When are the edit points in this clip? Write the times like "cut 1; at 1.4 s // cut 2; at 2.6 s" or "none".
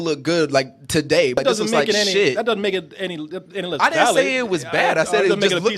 cut 1; at 1.4 s